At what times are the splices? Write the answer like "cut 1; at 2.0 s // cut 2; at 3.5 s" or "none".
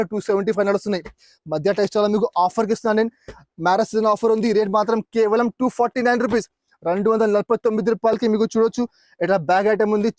none